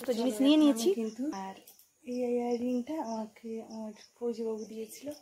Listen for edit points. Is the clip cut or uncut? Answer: cut